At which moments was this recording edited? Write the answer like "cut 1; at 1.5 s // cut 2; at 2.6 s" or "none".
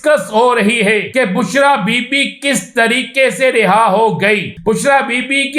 cut 1; at 1.1 s // cut 2; at 4.5 s

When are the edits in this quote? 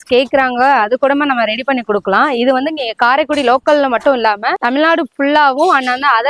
none

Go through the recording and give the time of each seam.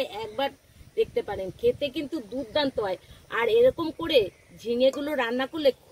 none

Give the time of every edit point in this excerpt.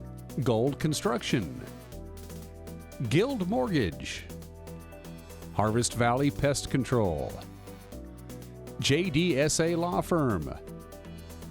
cut 1; at 10.6 s

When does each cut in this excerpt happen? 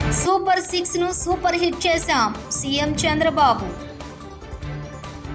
none

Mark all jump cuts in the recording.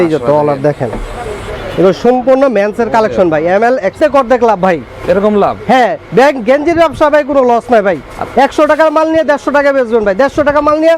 cut 1; at 3.9 s

